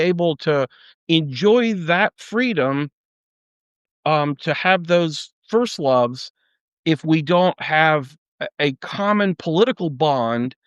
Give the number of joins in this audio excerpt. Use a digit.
0